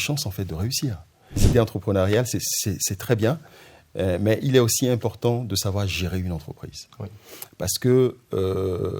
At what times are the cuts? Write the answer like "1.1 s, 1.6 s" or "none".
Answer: 1.4 s